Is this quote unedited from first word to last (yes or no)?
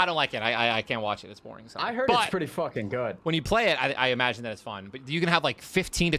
no